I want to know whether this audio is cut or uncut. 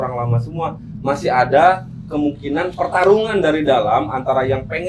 uncut